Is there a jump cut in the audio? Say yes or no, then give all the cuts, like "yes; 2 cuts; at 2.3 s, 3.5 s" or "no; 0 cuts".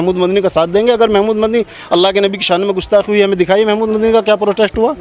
no; 0 cuts